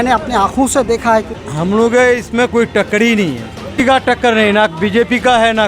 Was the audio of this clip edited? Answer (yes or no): yes